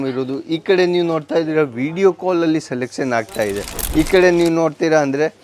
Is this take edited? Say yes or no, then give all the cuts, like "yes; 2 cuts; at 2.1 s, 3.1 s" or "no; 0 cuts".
yes; 1 cut; at 3.7 s